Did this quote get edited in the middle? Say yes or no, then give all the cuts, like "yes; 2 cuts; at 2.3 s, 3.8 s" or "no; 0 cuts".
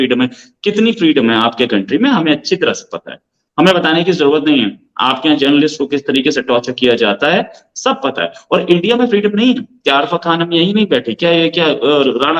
no; 0 cuts